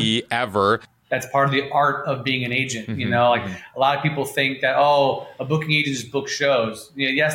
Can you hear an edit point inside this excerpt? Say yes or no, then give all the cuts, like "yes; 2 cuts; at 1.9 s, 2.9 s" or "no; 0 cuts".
yes; 1 cut; at 0.9 s